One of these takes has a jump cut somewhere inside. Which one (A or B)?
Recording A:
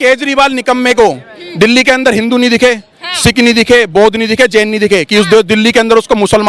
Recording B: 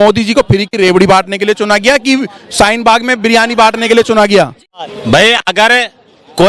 B